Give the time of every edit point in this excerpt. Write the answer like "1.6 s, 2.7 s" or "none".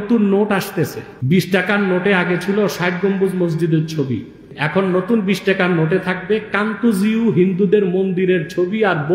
1.1 s, 4.5 s